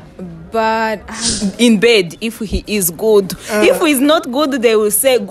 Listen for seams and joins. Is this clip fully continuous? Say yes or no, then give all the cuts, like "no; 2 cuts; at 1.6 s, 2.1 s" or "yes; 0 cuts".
no; 1 cut; at 1.3 s